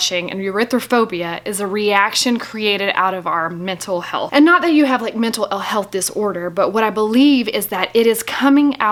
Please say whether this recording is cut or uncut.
uncut